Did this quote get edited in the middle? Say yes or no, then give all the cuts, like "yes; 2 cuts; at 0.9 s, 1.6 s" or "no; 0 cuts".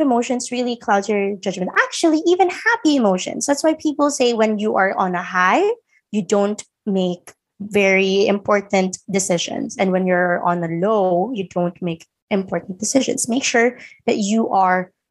no; 0 cuts